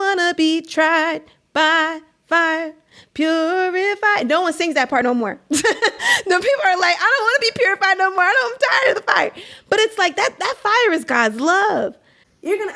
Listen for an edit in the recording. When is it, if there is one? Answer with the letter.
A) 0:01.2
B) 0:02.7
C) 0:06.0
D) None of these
D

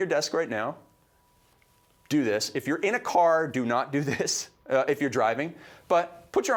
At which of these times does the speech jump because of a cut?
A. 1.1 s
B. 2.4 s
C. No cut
C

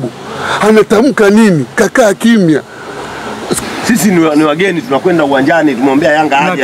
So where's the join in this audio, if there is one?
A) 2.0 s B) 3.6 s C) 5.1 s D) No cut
B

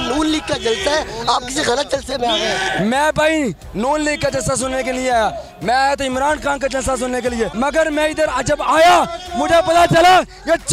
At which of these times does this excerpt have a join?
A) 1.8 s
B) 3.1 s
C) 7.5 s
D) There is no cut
C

